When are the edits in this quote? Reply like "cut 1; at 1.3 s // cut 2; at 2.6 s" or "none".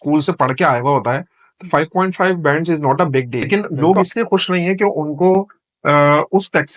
cut 1; at 3.5 s

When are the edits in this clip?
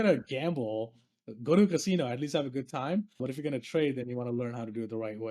cut 1; at 3.2 s

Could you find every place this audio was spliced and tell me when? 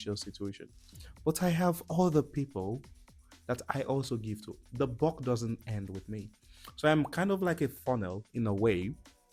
none

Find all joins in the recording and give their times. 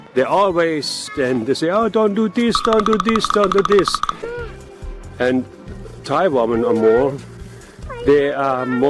cut 1; at 4.4 s

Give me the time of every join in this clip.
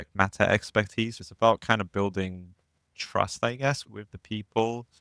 cut 1; at 1.2 s

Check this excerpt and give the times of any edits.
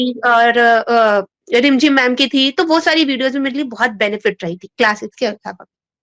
none

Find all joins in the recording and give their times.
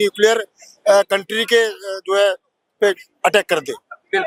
none

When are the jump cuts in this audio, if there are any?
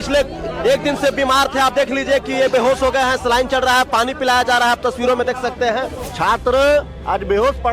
cut 1; at 6.0 s

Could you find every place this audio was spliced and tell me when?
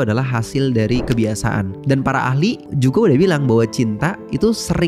cut 1; at 1.8 s // cut 2; at 2.7 s

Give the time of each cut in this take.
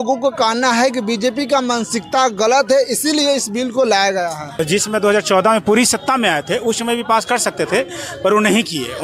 cut 1; at 4.4 s

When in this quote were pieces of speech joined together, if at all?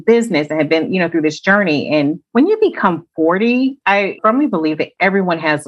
cut 1; at 2.2 s // cut 2; at 4.1 s

